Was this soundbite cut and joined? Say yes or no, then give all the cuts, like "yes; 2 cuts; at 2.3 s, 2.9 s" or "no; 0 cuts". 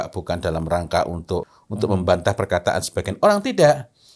yes; 1 cut; at 1.6 s